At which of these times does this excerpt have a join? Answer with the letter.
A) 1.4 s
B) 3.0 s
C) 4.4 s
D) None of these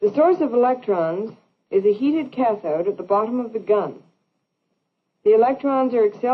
D